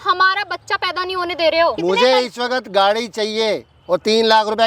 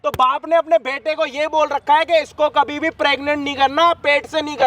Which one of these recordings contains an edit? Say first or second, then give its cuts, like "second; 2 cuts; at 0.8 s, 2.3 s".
first; 1 cut; at 1.8 s